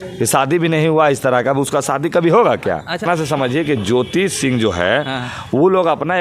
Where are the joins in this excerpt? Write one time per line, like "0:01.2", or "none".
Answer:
0:03.0